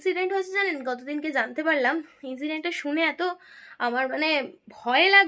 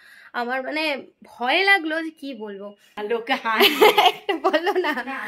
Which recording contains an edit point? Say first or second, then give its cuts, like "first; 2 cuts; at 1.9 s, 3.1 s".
second; 1 cut; at 3.0 s